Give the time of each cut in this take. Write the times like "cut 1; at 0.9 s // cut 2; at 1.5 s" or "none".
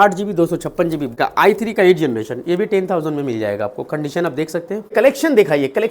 cut 1; at 1.1 s // cut 2; at 4.9 s